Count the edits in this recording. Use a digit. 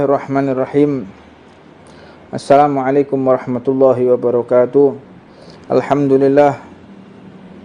0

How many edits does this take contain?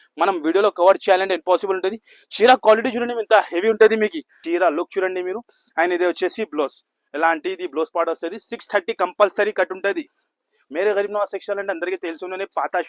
1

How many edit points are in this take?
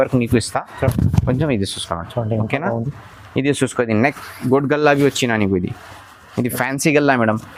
0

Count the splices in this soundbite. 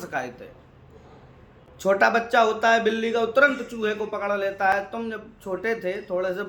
0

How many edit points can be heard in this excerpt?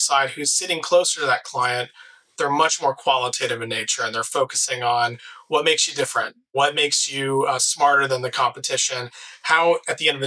1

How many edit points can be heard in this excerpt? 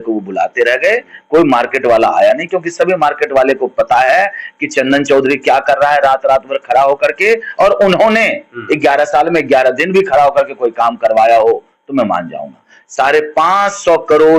1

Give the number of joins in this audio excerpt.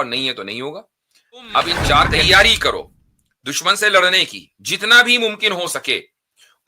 1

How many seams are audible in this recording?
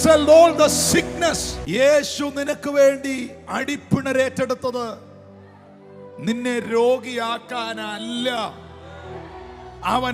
1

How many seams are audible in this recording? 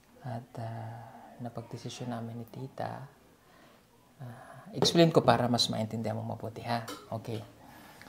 0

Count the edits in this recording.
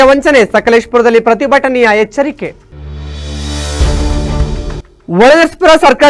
0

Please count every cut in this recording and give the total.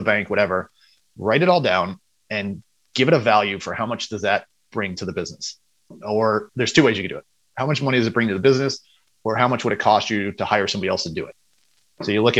0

